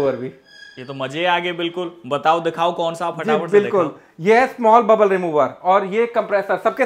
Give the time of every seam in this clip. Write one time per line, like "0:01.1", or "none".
none